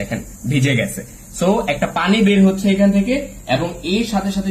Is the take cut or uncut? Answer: uncut